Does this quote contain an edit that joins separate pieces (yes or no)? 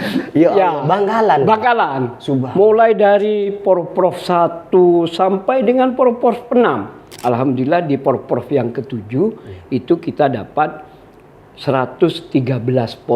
yes